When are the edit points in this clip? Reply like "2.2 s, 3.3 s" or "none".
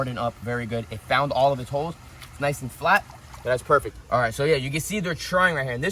3.9 s